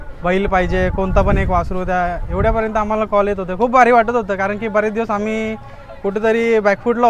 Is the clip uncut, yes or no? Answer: yes